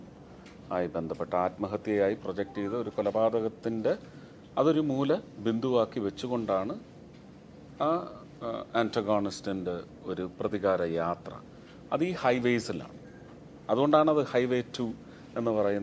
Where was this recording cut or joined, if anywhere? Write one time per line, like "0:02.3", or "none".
none